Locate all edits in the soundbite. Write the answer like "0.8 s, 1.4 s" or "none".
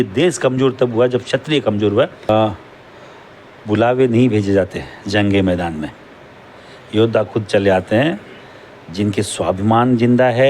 2.3 s